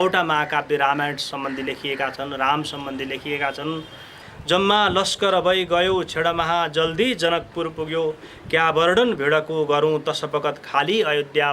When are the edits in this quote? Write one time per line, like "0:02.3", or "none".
0:04.3